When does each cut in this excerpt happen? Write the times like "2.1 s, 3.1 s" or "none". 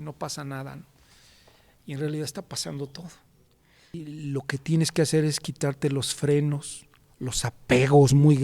4.0 s